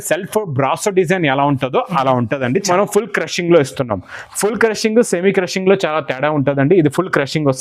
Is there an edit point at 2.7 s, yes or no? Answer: yes